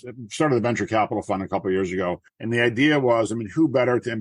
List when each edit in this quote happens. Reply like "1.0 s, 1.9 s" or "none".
2.3 s